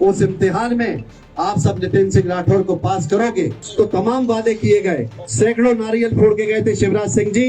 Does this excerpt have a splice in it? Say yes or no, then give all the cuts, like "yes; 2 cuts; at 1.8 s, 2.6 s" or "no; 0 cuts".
yes; 1 cut; at 3.6 s